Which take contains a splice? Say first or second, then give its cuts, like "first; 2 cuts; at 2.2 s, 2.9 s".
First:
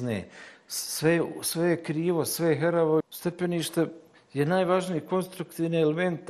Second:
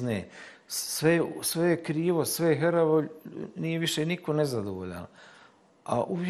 first; 1 cut; at 3.1 s